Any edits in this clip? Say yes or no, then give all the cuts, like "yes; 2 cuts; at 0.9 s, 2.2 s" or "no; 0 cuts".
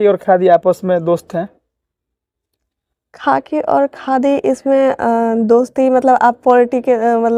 no; 0 cuts